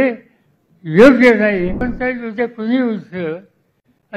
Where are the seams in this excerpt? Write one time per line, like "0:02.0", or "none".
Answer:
0:01.9